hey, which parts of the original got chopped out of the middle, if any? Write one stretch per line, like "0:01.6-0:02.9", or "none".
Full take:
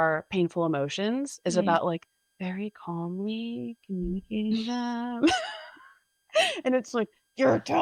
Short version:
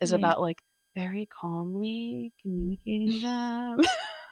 none